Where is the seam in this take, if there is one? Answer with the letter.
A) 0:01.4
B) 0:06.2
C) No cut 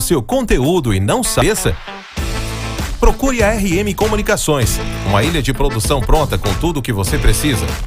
A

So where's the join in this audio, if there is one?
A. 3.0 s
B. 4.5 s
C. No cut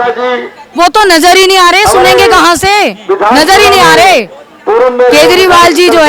C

